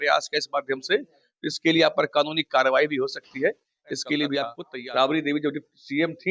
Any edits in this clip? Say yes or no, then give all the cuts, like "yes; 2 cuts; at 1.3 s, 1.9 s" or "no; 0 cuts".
yes; 1 cut; at 4.6 s